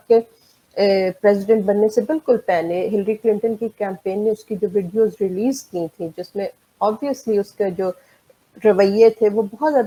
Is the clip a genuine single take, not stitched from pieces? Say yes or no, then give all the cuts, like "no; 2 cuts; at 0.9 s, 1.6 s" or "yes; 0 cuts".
yes; 0 cuts